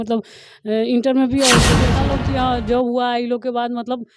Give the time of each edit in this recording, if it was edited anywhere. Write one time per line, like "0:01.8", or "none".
0:01.8